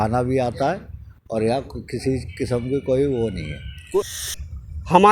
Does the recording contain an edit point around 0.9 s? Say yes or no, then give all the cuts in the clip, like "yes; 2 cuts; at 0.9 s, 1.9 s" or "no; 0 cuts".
no; 1 cut; at 4.2 s